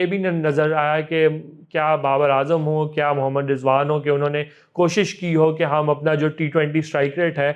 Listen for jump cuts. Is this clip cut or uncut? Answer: uncut